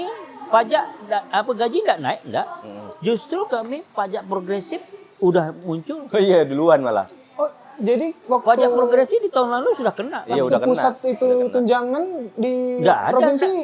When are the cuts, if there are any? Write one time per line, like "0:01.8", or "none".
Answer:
none